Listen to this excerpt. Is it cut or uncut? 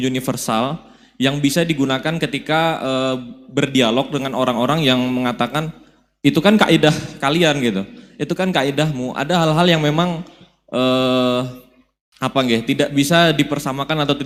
uncut